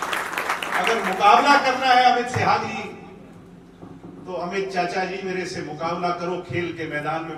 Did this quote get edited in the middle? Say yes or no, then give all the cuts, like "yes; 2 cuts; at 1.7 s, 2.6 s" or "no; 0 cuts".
no; 0 cuts